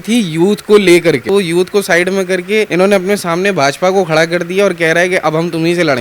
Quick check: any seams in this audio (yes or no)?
yes